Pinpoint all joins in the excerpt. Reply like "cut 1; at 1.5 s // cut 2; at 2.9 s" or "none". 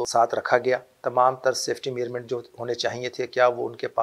cut 1; at 0.9 s